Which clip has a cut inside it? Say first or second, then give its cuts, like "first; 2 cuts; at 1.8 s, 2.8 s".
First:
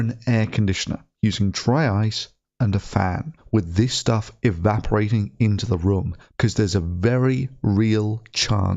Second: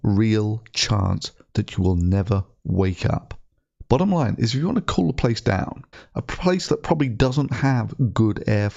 first; 1 cut; at 3.3 s